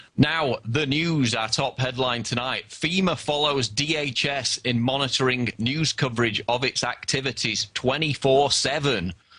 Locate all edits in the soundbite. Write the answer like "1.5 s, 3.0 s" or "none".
5.3 s